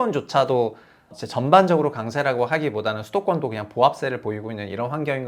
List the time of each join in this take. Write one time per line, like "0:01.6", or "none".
0:01.2

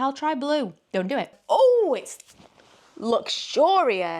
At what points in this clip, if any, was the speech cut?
0:01.4

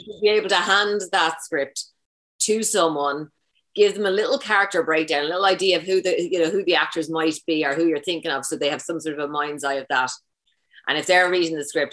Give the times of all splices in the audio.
none

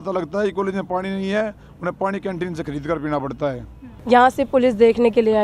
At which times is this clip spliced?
0:03.9

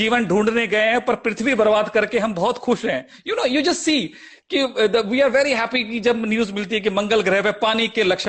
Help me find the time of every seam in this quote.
none

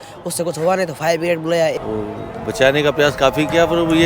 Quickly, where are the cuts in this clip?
0:01.8

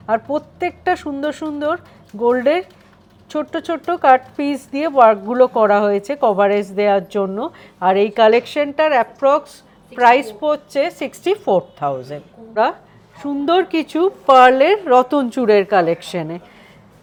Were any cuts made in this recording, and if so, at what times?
none

